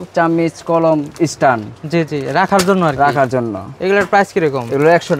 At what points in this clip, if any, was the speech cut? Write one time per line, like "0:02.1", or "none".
none